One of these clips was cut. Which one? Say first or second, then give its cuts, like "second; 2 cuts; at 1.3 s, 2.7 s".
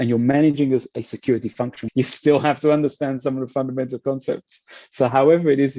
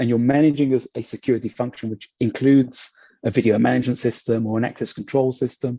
first; 1 cut; at 1.8 s